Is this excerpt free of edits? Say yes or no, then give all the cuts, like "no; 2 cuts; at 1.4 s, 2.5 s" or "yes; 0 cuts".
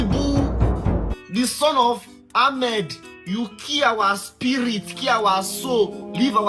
no; 2 cuts; at 1.2 s, 3.0 s